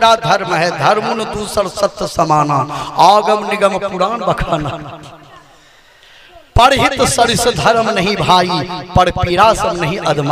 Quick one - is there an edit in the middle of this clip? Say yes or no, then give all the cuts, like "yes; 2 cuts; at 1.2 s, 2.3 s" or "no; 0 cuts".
no; 0 cuts